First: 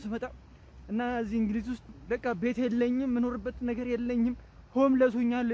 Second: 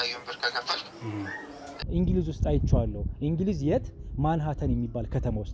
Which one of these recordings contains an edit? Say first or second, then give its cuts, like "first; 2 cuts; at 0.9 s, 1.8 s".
second; 1 cut; at 1.7 s